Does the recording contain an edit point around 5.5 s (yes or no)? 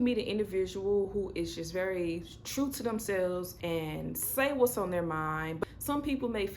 yes